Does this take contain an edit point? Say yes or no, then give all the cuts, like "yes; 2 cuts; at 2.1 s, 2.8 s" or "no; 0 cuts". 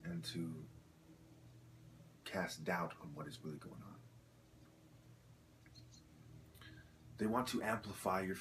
yes; 1 cut; at 7.1 s